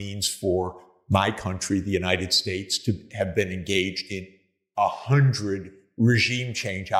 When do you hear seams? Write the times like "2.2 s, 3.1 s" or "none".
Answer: none